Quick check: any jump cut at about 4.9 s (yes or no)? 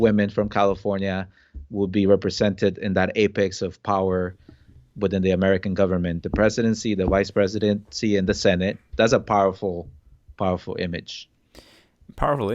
no